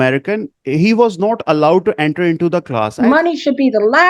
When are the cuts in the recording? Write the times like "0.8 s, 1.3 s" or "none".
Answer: 2.9 s